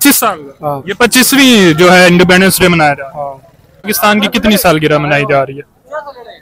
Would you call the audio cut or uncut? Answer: cut